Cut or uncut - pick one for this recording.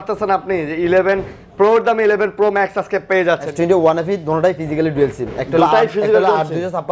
cut